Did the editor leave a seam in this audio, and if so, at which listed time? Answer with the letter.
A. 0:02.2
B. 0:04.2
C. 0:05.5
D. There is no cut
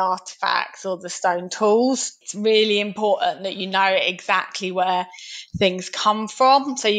D